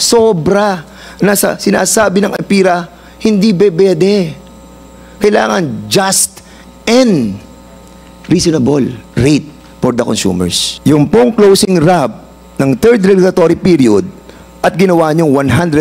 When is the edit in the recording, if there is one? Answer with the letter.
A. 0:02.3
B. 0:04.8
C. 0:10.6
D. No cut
C